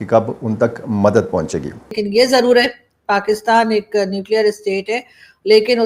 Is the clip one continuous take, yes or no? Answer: no